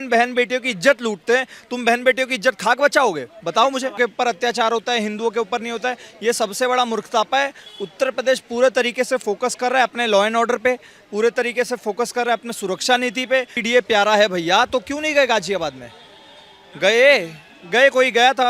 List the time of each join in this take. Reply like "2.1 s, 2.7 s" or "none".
4.0 s, 13.6 s

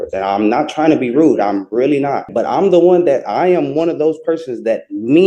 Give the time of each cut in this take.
2.3 s

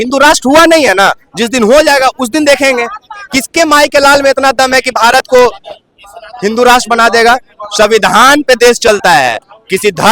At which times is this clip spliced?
none

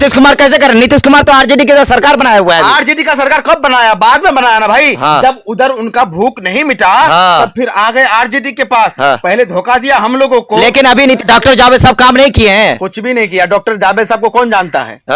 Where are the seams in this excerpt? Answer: 11.2 s

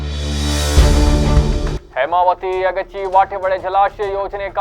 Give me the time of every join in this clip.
none

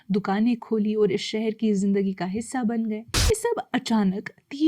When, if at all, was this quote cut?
3.1 s

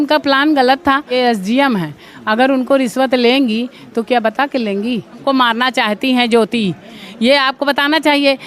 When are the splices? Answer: 1.1 s, 5.2 s

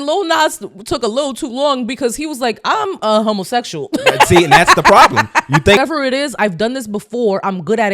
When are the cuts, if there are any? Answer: 5.8 s

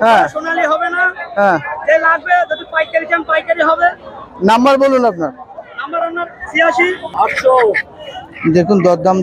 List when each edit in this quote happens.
7.1 s

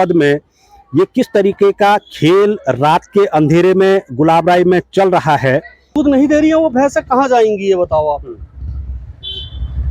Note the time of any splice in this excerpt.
5.9 s

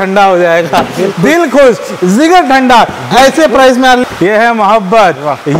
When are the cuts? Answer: 4.0 s

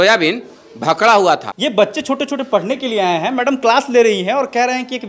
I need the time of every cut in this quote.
1.5 s

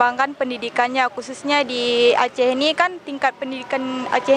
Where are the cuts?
none

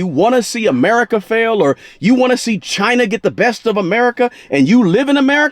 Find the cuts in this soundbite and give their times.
none

